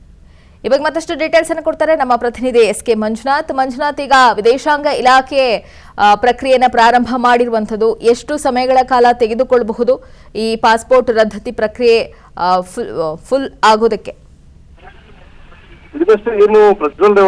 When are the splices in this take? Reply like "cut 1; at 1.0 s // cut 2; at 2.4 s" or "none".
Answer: cut 1; at 14.8 s